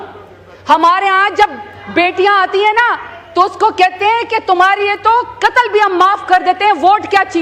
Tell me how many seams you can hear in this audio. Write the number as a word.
zero